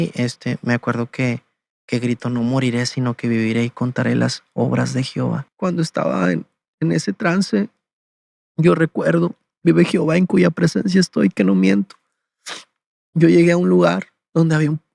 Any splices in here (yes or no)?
yes